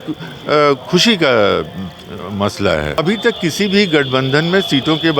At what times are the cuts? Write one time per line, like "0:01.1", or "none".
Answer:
0:03.0